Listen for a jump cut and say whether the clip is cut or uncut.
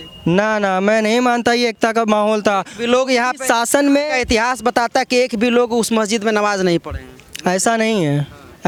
uncut